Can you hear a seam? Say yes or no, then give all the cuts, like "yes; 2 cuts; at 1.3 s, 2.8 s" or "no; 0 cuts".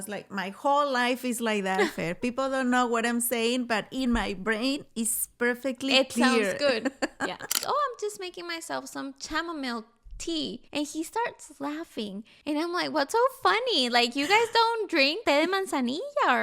yes; 4 cuts; at 7.6 s, 10.6 s, 12.3 s, 15.2 s